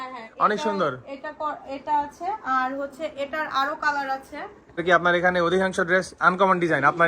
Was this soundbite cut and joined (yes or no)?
yes